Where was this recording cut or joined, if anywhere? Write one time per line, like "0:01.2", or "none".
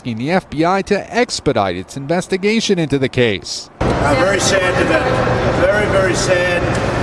none